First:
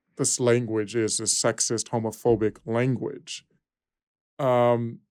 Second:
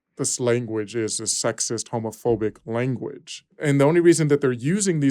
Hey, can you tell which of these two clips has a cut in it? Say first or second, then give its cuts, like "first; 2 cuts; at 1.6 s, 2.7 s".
second; 1 cut; at 3.5 s